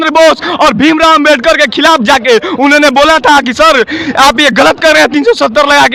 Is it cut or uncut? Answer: uncut